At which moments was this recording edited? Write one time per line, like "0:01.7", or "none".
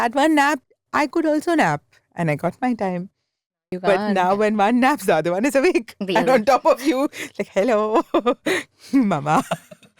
none